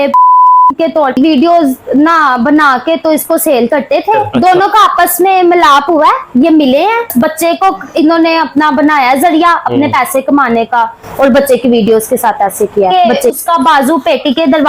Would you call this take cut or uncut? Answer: cut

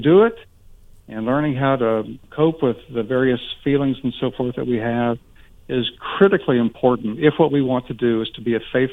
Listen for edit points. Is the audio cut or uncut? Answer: cut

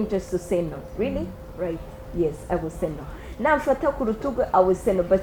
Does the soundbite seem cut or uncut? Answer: uncut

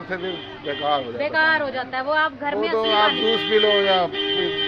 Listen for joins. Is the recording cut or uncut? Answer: uncut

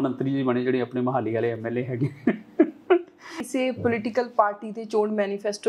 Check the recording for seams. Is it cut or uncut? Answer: cut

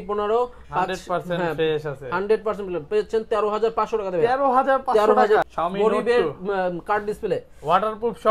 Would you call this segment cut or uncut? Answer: cut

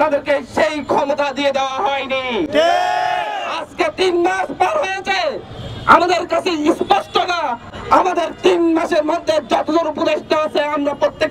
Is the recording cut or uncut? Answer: uncut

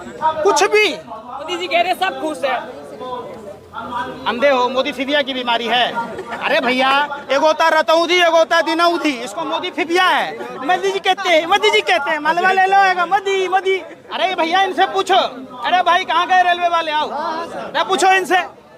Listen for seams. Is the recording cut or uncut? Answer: cut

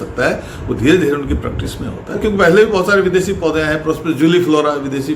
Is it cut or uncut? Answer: cut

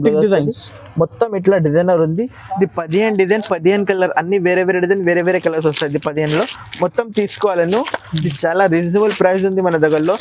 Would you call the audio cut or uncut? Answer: uncut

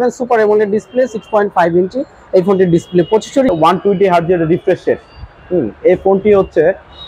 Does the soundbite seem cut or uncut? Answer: cut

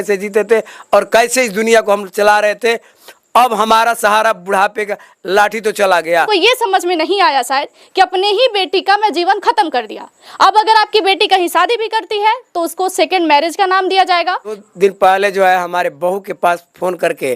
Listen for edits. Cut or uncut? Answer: cut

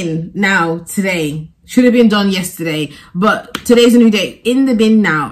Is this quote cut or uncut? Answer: uncut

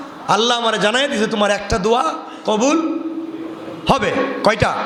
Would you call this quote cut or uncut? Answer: uncut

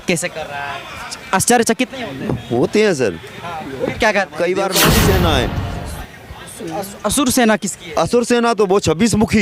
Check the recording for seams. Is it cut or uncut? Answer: cut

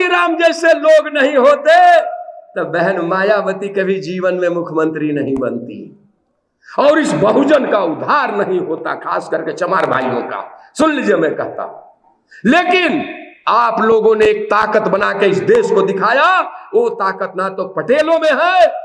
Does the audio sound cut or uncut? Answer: uncut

